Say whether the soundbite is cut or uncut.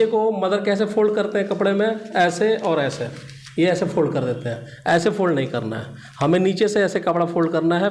uncut